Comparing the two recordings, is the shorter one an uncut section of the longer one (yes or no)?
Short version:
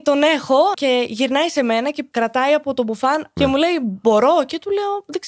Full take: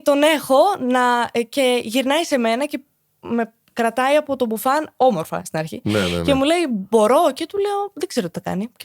no